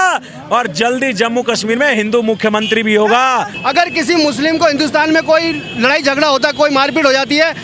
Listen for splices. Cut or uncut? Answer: cut